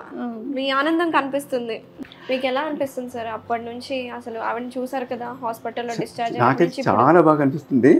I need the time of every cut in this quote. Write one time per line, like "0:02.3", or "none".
0:02.0